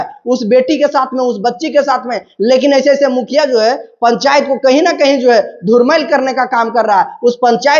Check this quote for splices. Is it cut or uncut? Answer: uncut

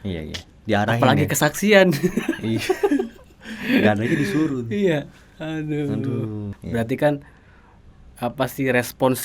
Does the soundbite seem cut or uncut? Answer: uncut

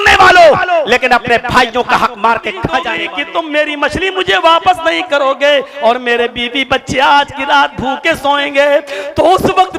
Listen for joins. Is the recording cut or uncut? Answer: cut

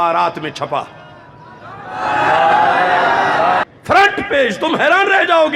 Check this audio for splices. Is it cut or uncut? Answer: cut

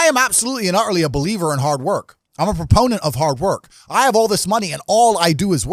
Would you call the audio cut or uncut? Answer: uncut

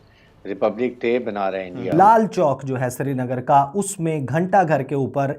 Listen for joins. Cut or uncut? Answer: cut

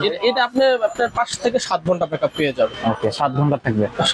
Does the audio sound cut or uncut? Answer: uncut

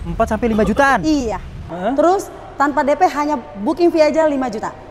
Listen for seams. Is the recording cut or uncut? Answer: cut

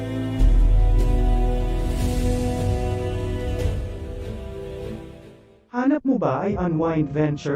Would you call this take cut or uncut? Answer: cut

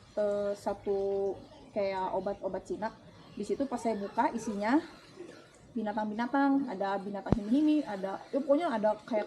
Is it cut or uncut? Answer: uncut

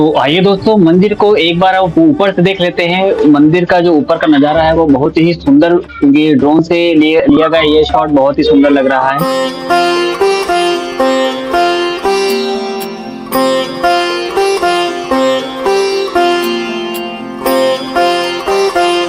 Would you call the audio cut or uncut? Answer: uncut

